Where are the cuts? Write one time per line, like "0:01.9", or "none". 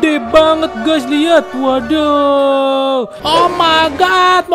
0:03.2

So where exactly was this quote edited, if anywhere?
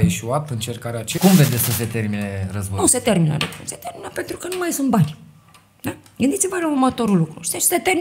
0:01.1

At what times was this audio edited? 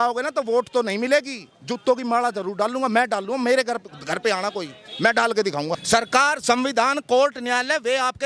0:05.8

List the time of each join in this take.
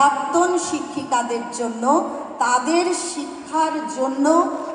none

